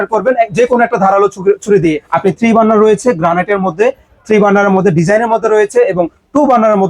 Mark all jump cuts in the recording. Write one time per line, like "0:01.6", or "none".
0:02.1